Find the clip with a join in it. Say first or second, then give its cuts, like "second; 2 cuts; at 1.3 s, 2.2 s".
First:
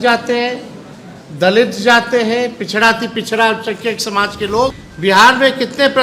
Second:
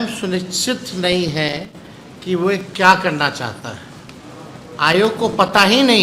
first; 1 cut; at 4.9 s